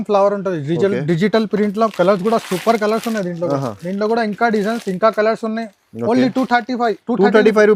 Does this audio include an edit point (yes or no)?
no